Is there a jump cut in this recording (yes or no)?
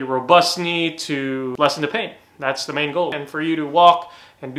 yes